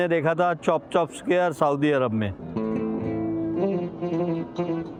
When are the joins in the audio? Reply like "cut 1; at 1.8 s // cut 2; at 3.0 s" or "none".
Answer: none